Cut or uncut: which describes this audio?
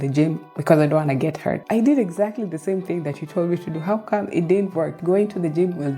cut